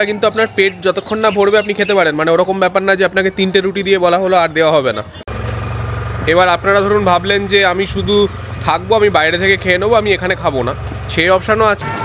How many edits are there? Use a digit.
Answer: 0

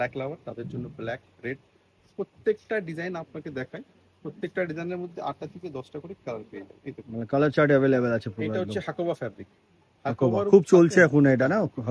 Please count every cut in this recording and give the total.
0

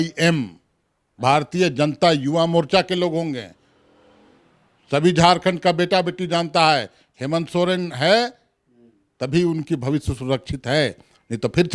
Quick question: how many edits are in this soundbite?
0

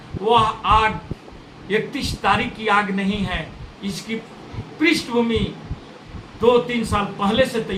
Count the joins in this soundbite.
0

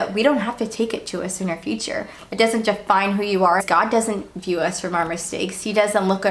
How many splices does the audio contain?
1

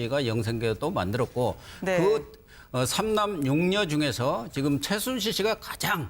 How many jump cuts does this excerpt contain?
1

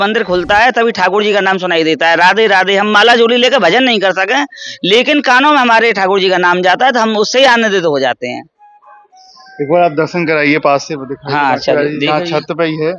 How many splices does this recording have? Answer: 0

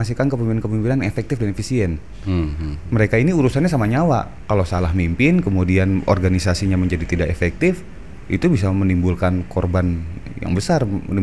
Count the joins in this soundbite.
0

